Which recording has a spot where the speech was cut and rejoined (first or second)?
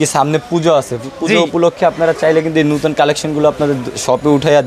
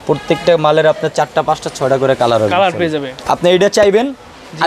second